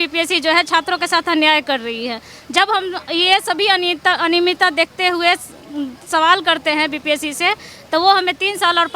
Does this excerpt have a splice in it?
no; 0 cuts

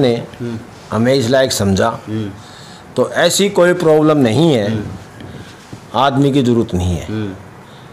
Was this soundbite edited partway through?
no; 0 cuts

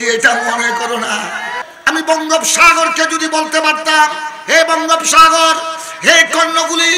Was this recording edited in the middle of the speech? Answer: yes; 1 cut; at 1.7 s

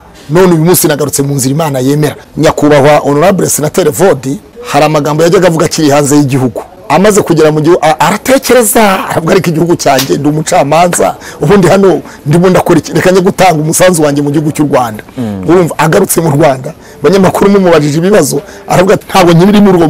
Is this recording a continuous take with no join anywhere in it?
no; 4 cuts; at 2.2 s, 4.5 s, 6.7 s, 19.0 s

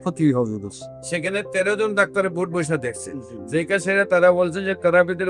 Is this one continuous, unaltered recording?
yes; 0 cuts

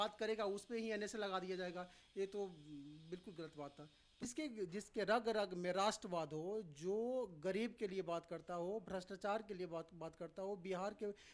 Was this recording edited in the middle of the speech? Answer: yes; 1 cut; at 4.0 s

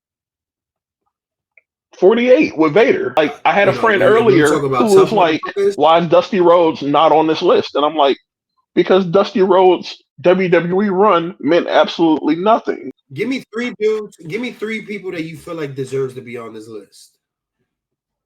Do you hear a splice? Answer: yes; 2 cuts; at 3.2 s, 13.0 s

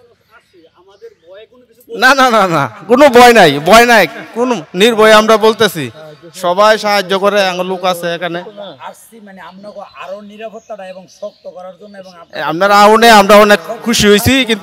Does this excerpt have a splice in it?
no; 0 cuts

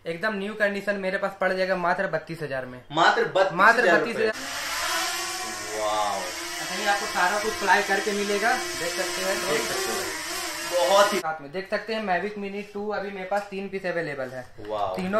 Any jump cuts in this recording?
yes; 2 cuts; at 4.3 s, 11.2 s

